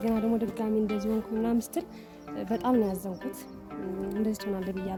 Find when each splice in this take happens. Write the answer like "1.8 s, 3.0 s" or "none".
none